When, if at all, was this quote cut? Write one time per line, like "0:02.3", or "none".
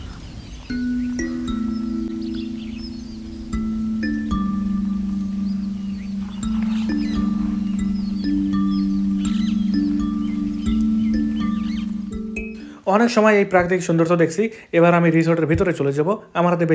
none